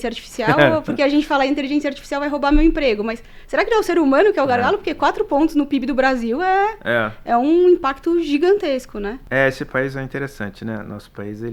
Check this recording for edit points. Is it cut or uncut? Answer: uncut